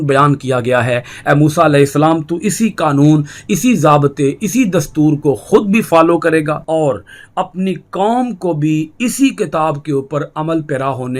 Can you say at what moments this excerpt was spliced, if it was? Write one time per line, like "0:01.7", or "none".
0:06.6